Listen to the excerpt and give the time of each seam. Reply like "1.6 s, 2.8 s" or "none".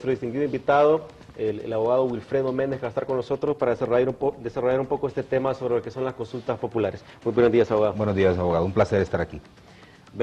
none